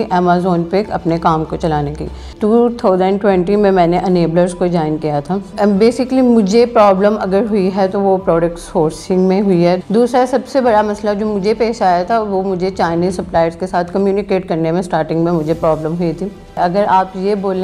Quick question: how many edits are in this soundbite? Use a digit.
4